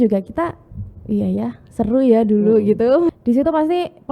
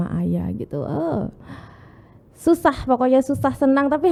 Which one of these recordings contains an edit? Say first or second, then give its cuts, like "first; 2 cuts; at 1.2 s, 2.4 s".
first; 1 cut; at 3.2 s